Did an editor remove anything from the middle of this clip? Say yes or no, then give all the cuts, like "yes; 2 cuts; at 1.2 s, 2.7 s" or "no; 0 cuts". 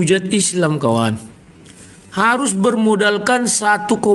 no; 0 cuts